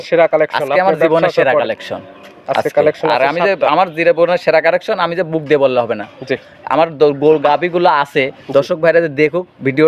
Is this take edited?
no; 0 cuts

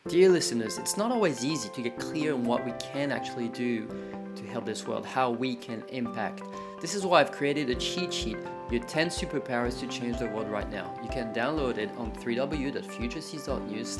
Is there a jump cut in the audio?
no; 0 cuts

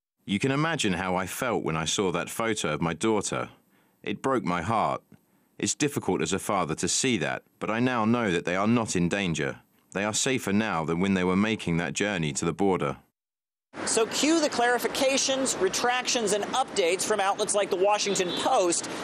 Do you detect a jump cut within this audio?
yes; 1 cut; at 2.1 s

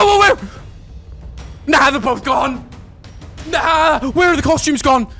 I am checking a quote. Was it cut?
no; 0 cuts

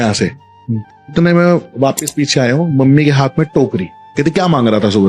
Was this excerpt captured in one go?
no; 2 cuts; at 1.1 s, 4.0 s

